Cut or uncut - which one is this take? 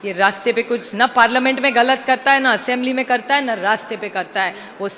uncut